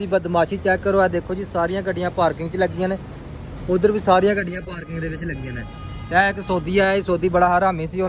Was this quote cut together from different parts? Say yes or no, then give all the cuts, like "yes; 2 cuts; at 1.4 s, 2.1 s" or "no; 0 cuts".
no; 0 cuts